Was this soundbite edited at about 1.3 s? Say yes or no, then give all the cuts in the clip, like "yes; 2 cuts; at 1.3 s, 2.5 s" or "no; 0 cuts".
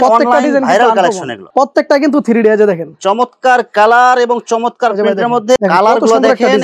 yes; 2 cuts; at 1.3 s, 5.6 s